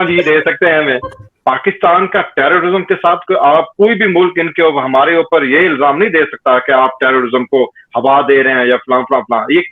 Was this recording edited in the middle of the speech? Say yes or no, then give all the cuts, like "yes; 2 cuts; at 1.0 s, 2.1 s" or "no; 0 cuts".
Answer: yes; 1 cut; at 1.1 s